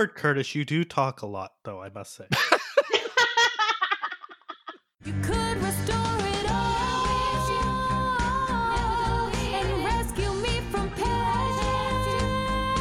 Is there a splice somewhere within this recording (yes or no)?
yes